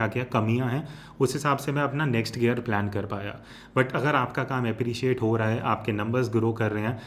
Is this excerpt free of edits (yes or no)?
no